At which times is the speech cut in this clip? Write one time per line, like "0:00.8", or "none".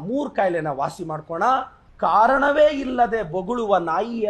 0:01.8

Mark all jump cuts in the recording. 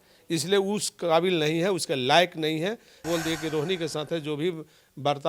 0:03.0

